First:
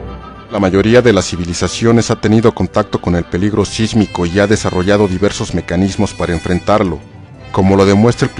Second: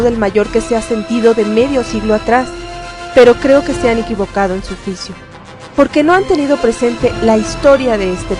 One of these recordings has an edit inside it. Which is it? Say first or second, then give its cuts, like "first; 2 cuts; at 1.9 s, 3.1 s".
first; 1 cut; at 6.4 s